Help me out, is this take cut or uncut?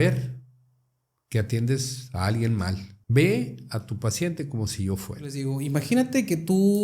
cut